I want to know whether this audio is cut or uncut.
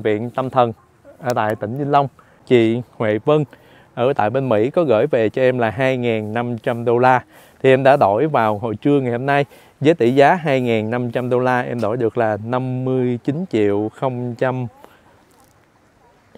cut